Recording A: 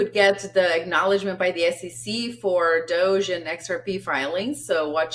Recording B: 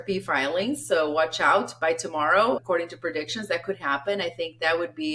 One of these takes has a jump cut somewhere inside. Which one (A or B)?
B